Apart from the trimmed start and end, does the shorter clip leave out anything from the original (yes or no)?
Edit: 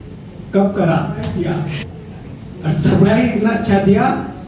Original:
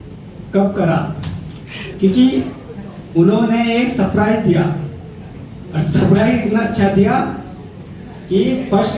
yes